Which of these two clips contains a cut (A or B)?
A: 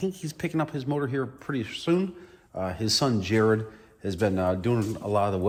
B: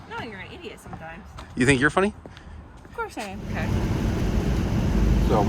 B